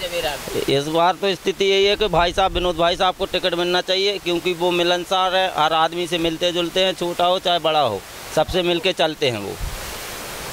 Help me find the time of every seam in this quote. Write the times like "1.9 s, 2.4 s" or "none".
none